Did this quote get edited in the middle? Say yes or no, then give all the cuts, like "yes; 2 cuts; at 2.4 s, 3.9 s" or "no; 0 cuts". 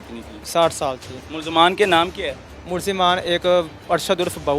yes; 1 cut; at 1.1 s